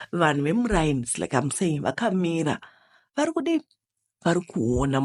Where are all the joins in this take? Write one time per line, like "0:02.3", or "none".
none

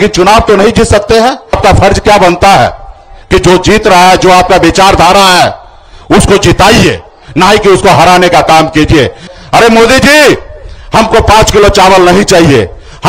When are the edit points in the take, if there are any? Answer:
0:01.6
0:09.3

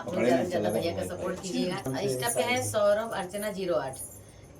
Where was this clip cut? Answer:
0:01.9

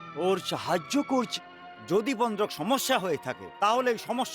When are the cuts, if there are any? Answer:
0:01.4

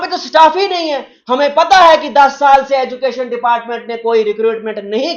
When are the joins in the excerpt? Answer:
none

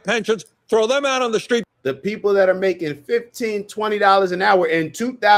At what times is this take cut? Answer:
none

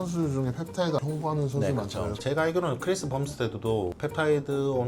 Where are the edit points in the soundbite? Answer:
0:01.0
0:02.2

